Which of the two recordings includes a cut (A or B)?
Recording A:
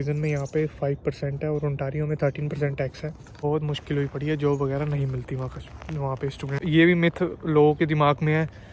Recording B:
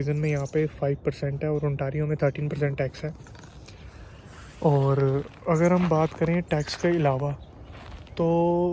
A